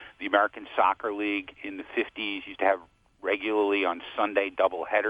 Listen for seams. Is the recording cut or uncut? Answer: uncut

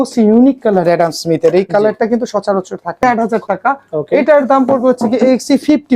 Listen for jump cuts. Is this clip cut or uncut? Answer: cut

